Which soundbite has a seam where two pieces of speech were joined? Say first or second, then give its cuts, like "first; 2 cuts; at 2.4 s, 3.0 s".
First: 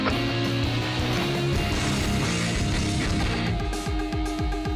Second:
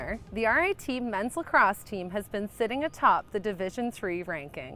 second; 1 cut; at 1.5 s